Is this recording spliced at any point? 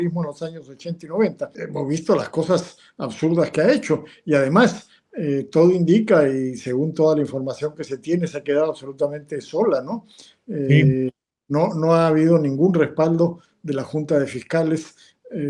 yes; 1 cut; at 1.5 s

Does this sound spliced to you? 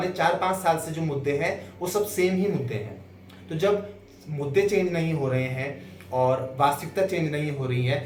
no; 0 cuts

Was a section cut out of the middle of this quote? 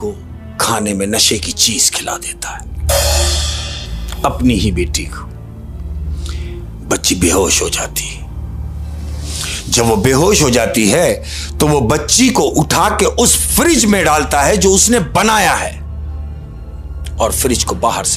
no; 0 cuts

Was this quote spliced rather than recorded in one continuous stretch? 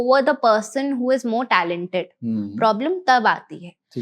no; 0 cuts

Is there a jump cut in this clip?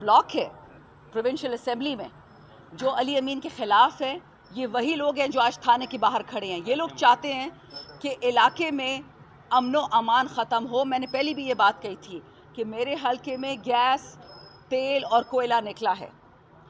no; 0 cuts

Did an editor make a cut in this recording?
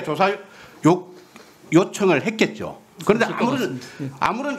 no; 0 cuts

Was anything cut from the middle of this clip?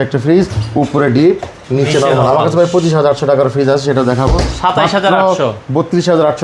no; 0 cuts

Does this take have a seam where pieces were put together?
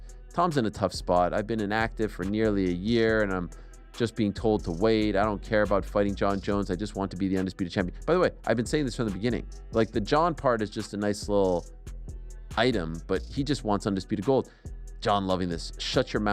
no; 0 cuts

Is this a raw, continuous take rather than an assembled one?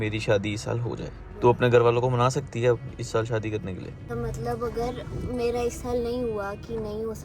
no; 2 cuts; at 1.2 s, 4.0 s

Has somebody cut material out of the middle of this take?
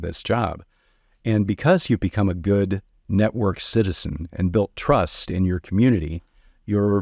no; 0 cuts

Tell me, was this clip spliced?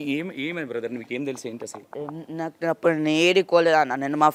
no; 0 cuts

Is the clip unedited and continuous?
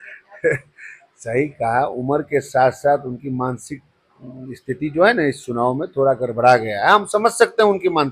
yes; 0 cuts

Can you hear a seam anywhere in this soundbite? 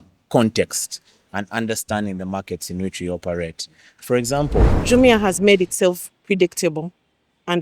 yes; 1 cut; at 4.7 s

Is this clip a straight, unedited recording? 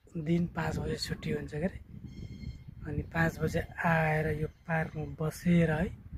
yes; 0 cuts

